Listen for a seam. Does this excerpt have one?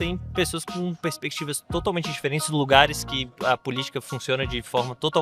no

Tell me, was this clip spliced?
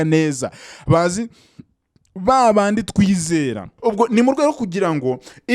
yes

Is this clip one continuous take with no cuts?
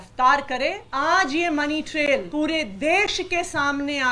no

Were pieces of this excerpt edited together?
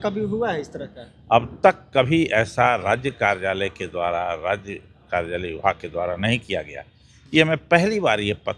no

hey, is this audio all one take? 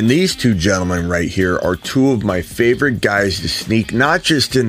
yes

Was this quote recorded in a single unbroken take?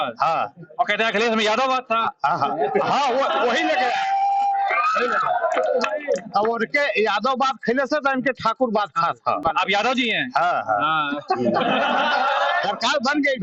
yes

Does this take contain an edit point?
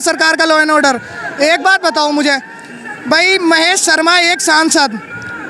no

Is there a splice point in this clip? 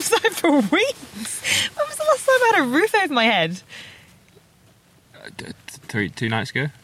no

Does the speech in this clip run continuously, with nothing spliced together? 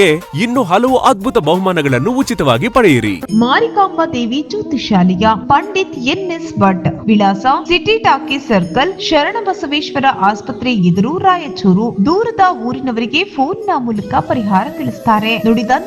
no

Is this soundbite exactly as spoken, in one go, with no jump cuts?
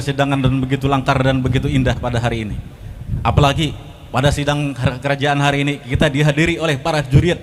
yes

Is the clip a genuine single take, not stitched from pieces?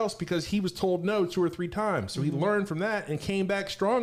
yes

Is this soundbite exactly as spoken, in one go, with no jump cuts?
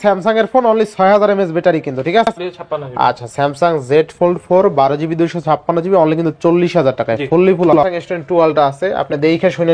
no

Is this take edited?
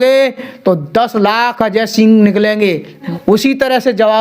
yes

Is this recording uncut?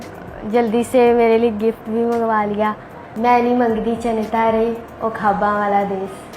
no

